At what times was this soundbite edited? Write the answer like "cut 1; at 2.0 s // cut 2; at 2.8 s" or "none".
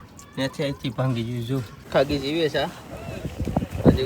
cut 1; at 1.8 s